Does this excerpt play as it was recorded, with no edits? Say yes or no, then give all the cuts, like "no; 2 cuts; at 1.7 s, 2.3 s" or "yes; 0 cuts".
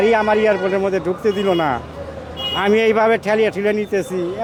yes; 0 cuts